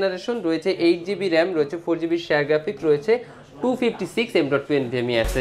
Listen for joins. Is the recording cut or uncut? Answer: uncut